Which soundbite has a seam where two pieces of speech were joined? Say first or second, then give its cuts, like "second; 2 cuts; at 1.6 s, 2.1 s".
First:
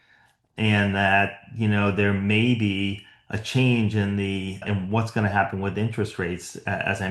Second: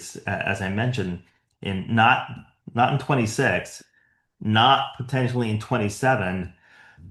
first; 1 cut; at 4.6 s